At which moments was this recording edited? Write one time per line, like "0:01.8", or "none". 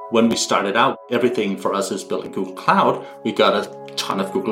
0:01.0